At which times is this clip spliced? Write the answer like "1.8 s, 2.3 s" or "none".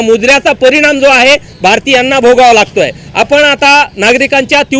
none